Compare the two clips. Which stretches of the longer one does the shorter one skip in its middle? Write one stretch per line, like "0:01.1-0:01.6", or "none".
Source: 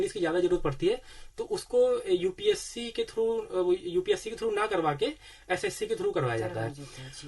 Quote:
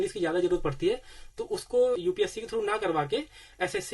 0:02.0-0:03.9